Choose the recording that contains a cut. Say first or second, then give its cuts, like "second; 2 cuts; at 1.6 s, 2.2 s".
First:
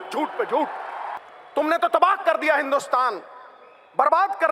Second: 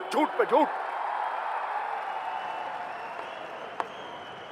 first; 1 cut; at 1.1 s